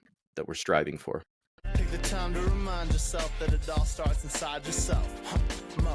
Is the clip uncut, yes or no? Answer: no